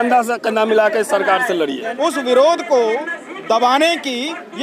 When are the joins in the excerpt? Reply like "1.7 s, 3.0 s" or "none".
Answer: 1.8 s